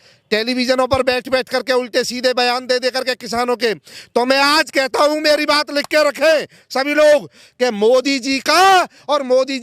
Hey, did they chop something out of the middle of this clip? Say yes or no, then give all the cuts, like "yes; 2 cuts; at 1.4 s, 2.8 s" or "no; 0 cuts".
no; 0 cuts